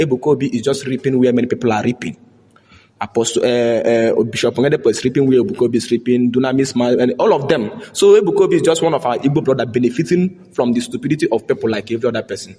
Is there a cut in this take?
no; 0 cuts

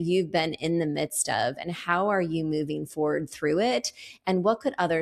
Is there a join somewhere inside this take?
no; 0 cuts

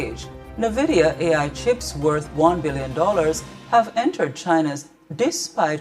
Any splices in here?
yes; 2 cuts; at 1.0 s, 3.9 s

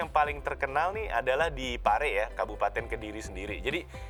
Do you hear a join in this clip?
no; 0 cuts

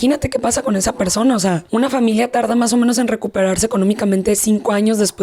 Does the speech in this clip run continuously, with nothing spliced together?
no; 1 cut; at 1.6 s

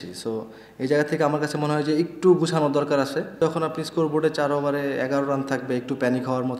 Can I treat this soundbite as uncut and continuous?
no; 1 cut; at 3.4 s

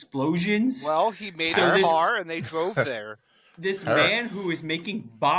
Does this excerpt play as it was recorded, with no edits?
yes; 0 cuts

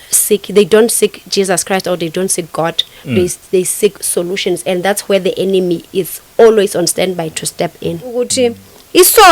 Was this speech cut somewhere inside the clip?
yes; 1 cut; at 8.3 s

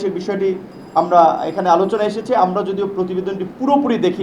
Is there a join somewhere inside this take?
no; 0 cuts

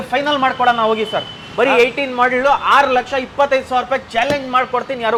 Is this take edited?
no; 0 cuts

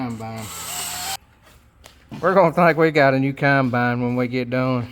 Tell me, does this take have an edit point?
yes; 1 cut; at 1.2 s

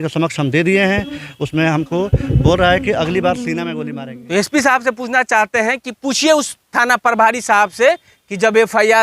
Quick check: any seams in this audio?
yes; 1 cut; at 3.8 s

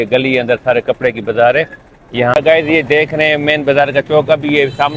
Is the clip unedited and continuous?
no; 1 cut; at 2.3 s

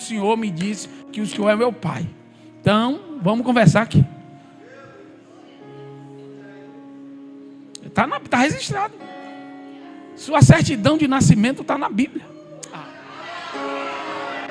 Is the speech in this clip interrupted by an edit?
no; 0 cuts

